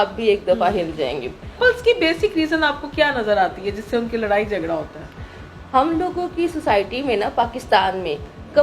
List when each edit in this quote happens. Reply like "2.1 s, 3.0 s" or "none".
1.6 s